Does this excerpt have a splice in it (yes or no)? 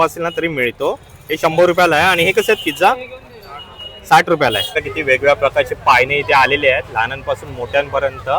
yes